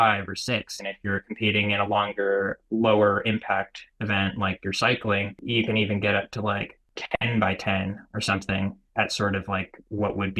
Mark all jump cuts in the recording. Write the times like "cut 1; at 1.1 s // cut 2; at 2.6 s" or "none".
cut 1; at 2.6 s // cut 2; at 5.4 s // cut 3; at 6.9 s // cut 4; at 8.8 s